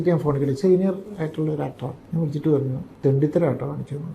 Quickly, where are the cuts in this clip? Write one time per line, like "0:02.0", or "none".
0:01.9
0:02.8